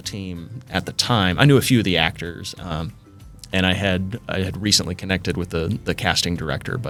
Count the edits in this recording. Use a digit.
0